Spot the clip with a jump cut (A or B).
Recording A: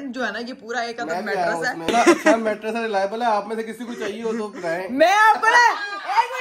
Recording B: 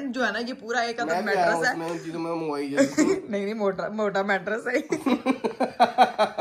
A